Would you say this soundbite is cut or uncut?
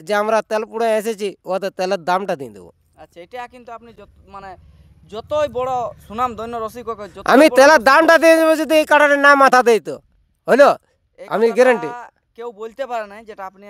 uncut